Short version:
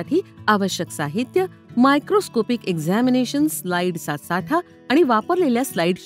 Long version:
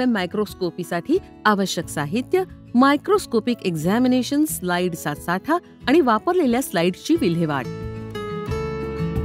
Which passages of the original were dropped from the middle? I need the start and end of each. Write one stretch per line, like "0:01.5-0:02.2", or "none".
none

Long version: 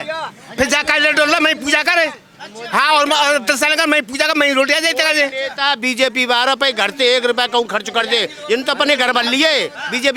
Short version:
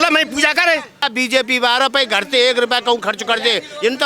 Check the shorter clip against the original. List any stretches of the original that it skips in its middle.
0:02.3-0:05.7

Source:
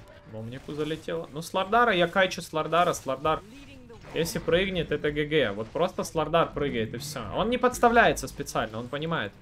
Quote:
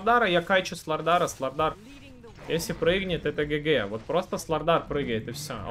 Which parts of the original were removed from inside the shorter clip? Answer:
none

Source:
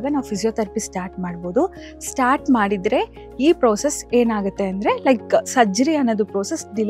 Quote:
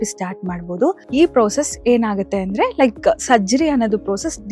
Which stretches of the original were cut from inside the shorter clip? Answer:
0:01.8-0:03.3

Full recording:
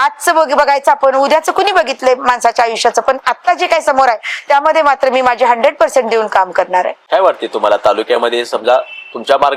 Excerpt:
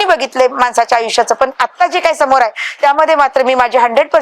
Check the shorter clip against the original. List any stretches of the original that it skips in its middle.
none

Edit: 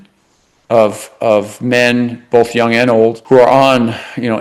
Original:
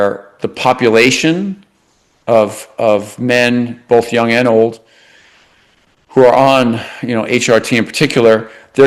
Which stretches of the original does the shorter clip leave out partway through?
0:04.8-0:06.1

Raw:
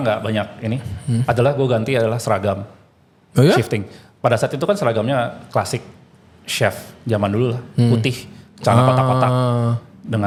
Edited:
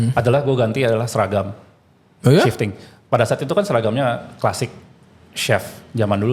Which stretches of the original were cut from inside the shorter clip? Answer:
none

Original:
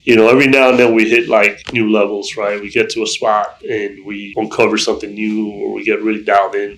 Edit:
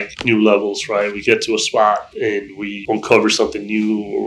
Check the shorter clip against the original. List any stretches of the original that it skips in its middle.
none

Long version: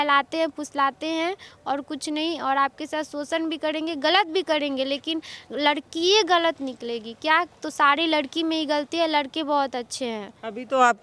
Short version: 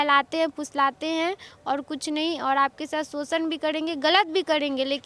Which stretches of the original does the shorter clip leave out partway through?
none

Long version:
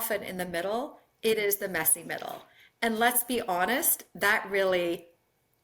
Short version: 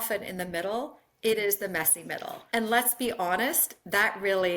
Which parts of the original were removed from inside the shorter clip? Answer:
0:02.3-0:02.6

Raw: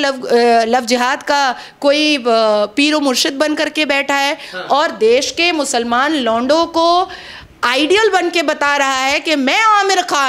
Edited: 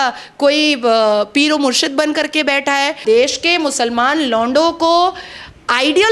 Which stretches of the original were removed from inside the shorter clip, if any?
0:04.4-0:04.9

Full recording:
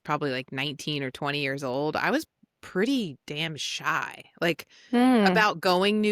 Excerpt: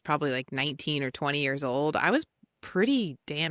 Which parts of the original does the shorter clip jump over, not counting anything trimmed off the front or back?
none

